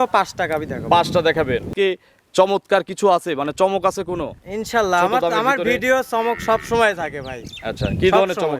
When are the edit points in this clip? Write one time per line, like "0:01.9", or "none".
0:01.7